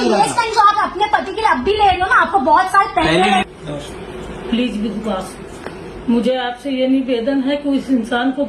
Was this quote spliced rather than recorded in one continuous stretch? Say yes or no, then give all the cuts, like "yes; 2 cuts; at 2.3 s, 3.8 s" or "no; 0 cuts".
yes; 1 cut; at 3.4 s